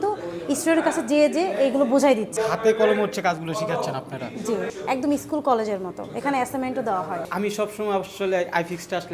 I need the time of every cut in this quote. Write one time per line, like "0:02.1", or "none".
0:02.3
0:04.7
0:07.3